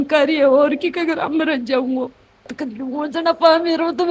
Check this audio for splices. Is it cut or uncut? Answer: cut